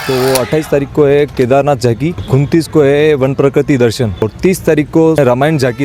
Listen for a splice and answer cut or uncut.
cut